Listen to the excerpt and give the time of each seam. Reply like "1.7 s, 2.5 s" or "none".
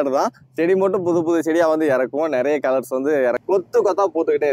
3.4 s